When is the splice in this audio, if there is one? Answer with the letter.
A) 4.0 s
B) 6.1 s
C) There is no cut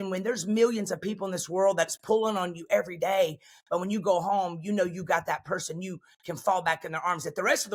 C